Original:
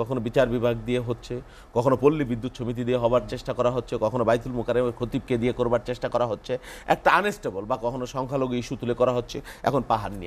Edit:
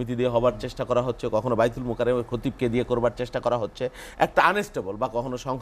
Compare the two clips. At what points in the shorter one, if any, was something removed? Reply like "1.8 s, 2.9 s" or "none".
none